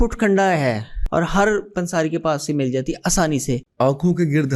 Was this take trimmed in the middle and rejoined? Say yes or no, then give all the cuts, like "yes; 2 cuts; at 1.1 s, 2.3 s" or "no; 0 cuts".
yes; 2 cuts; at 0.9 s, 3.6 s